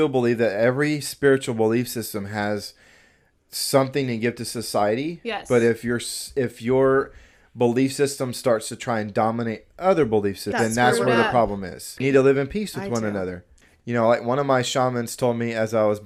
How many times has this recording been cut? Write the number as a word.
zero